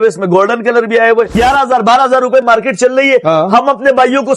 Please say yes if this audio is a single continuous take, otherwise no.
no